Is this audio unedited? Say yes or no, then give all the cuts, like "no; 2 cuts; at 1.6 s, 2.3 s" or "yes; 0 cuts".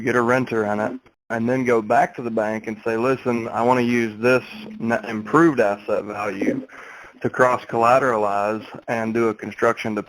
no; 1 cut; at 1.2 s